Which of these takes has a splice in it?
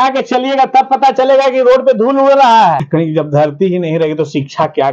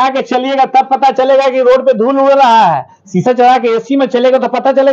first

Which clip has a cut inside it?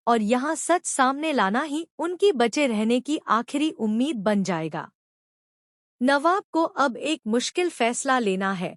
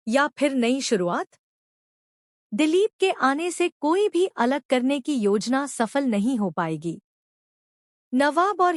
first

